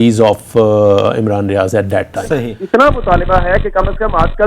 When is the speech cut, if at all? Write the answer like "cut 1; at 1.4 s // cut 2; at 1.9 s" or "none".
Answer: cut 1; at 2.5 s